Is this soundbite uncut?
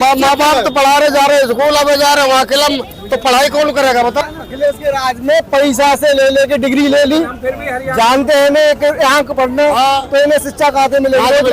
no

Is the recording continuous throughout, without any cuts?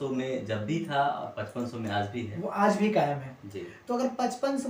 yes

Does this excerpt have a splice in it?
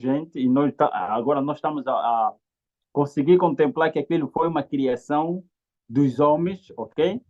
no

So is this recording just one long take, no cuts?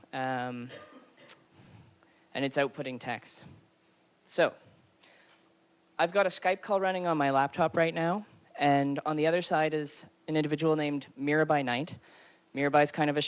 yes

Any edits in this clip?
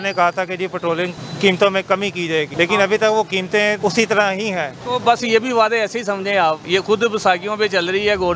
yes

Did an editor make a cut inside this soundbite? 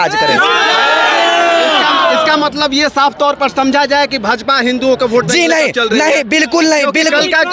no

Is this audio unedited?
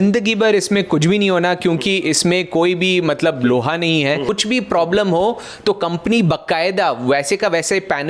no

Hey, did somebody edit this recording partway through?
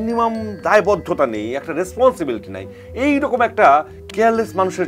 no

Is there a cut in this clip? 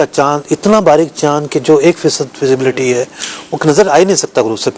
no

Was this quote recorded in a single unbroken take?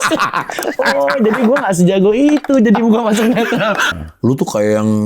no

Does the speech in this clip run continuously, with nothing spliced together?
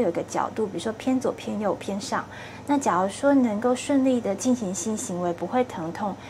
yes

